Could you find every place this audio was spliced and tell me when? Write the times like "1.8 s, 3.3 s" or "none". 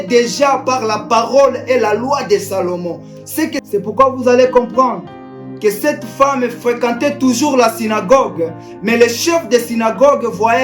3.6 s